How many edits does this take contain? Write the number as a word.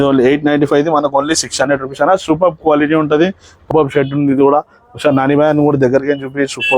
one